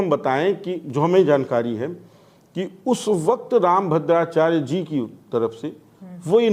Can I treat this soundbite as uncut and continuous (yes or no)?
yes